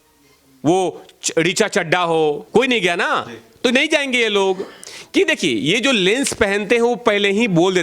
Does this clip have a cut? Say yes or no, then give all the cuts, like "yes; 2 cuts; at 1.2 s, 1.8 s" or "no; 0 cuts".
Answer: yes; 1 cut; at 2.4 s